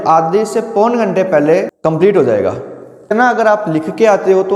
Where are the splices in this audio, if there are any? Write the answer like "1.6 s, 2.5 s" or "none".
1.7 s, 3.1 s